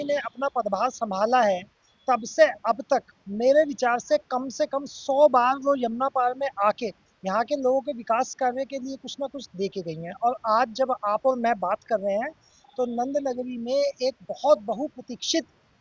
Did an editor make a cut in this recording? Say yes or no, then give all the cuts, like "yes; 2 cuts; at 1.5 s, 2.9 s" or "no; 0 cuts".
no; 0 cuts